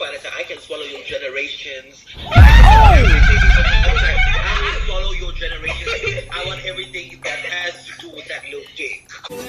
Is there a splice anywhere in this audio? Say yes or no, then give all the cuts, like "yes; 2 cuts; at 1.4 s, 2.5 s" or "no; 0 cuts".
no; 0 cuts